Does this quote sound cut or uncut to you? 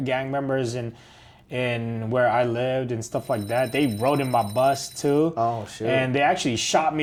uncut